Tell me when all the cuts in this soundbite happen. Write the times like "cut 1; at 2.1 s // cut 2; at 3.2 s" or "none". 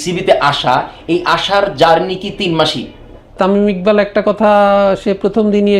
cut 1; at 3.3 s